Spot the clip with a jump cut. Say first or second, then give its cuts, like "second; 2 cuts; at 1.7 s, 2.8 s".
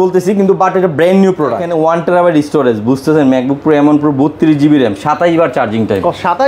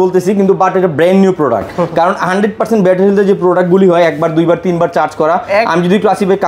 first; 1 cut; at 1.6 s